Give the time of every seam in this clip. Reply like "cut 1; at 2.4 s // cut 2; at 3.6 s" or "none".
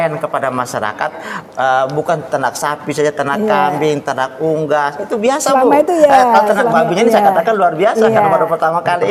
none

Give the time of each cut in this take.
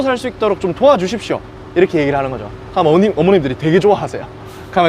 none

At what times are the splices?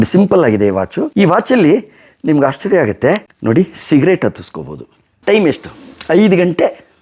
cut 1; at 1.0 s // cut 2; at 3.3 s // cut 3; at 5.0 s

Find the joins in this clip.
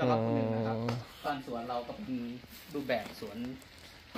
cut 1; at 1.1 s

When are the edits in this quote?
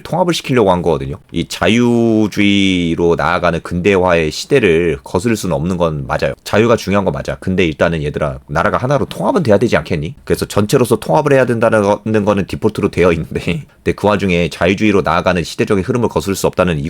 cut 1; at 6.4 s // cut 2; at 10.2 s

